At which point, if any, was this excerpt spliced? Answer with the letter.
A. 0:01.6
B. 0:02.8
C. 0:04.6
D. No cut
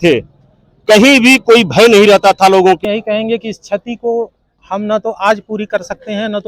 B